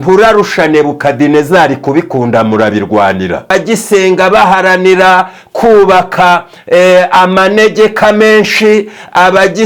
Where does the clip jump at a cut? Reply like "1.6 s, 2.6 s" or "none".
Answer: 3.5 s